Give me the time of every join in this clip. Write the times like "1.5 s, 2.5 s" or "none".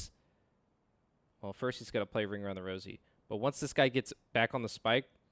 none